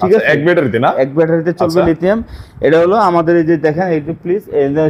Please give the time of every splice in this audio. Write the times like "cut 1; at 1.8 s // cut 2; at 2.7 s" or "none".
none